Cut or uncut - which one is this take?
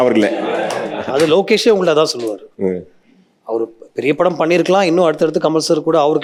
uncut